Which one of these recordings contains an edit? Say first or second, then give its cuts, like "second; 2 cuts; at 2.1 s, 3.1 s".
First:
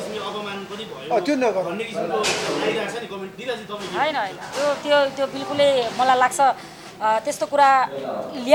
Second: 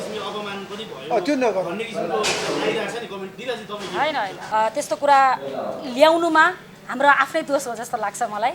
second; 1 cut; at 4.4 s